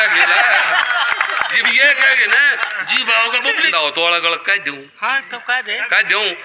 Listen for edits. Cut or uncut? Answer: cut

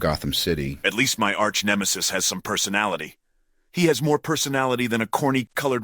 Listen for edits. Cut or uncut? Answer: uncut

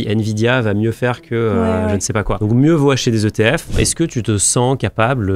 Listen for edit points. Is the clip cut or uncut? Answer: cut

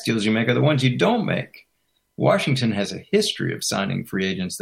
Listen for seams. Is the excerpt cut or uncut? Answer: uncut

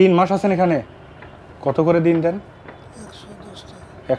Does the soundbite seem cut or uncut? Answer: uncut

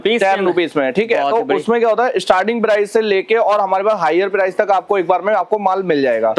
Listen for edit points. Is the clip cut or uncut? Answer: uncut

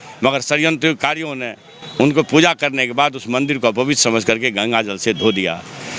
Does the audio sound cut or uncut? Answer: uncut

